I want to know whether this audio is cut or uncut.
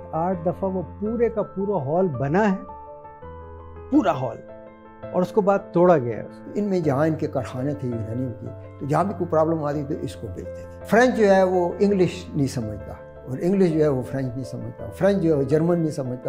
cut